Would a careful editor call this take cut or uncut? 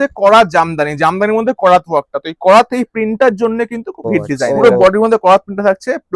cut